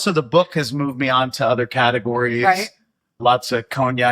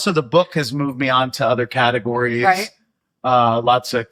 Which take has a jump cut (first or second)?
first